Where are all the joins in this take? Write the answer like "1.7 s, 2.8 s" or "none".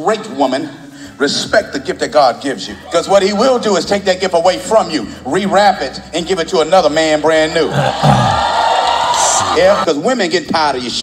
2.7 s, 9.8 s

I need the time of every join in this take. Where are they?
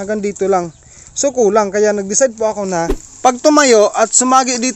3.0 s

